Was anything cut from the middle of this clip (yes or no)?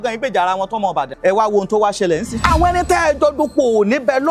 yes